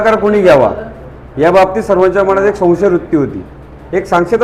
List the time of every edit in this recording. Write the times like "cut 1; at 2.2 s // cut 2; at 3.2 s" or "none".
none